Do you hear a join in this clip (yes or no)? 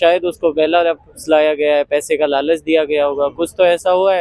no